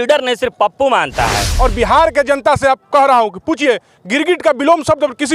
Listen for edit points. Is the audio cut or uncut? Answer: cut